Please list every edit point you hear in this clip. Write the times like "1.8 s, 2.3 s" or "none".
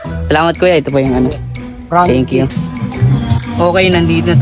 2.6 s